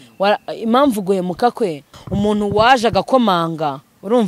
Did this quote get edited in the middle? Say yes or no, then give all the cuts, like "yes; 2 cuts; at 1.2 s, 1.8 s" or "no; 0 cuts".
yes; 1 cut; at 2.0 s